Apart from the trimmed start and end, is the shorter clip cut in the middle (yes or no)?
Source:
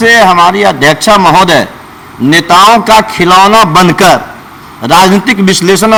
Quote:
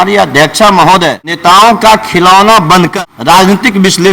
yes